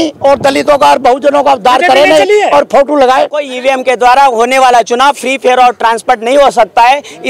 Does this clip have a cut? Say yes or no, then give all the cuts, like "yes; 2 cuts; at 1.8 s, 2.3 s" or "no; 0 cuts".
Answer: yes; 1 cut; at 3.5 s